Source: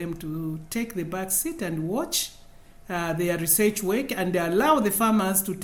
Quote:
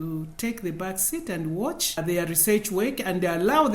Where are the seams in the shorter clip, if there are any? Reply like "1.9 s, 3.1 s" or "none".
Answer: 1.9 s